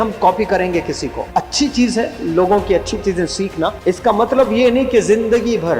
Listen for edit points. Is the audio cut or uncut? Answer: cut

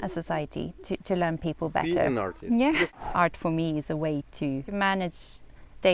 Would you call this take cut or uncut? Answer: cut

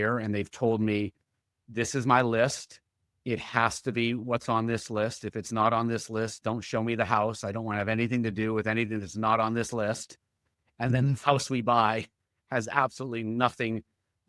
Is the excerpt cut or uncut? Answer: uncut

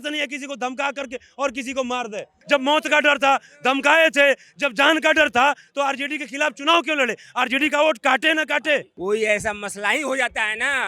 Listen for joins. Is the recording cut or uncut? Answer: cut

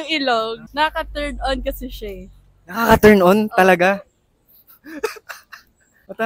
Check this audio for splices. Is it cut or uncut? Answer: uncut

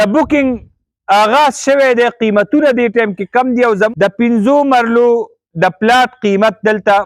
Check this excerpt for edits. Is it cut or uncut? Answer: cut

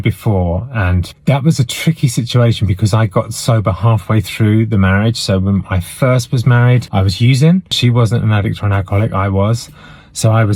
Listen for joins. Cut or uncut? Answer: cut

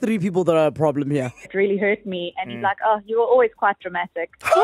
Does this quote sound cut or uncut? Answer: cut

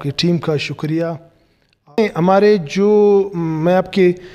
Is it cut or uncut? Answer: cut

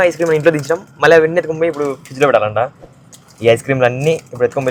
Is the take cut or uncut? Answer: uncut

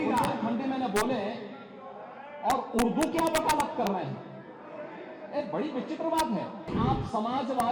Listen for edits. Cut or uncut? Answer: cut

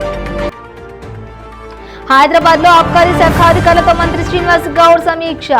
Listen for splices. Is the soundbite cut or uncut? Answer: cut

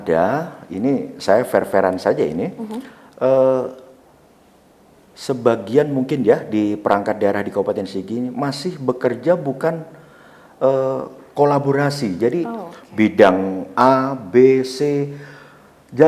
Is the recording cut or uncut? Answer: uncut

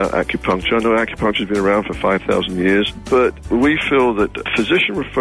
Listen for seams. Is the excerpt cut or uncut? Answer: cut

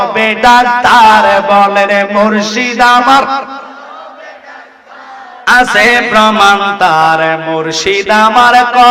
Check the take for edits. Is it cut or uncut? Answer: uncut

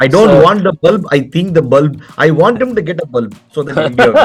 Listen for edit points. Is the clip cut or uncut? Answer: uncut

